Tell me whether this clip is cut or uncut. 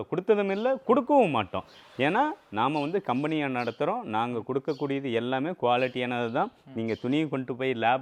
uncut